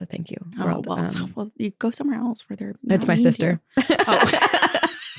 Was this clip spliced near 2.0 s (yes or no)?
no